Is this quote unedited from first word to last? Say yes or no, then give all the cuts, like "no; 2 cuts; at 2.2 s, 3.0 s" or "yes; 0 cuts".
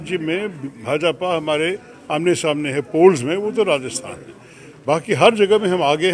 yes; 0 cuts